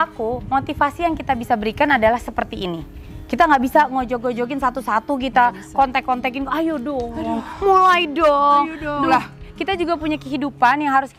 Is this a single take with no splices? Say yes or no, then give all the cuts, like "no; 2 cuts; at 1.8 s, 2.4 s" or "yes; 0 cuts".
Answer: yes; 0 cuts